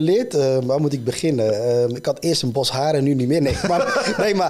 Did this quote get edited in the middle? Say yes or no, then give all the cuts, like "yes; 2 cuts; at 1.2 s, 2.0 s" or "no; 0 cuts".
no; 0 cuts